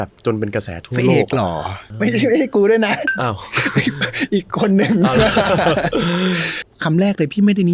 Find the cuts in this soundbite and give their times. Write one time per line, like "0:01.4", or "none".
0:01.8
0:06.5